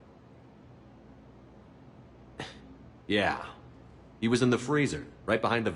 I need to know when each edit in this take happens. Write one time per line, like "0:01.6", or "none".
0:02.4